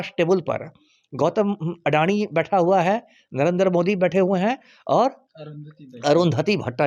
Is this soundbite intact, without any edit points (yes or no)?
yes